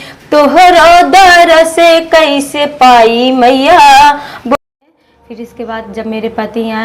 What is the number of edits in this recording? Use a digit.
1